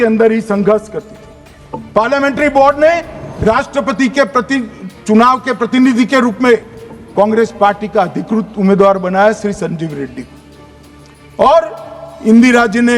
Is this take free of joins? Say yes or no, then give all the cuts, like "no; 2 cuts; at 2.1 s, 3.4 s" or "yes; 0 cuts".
yes; 0 cuts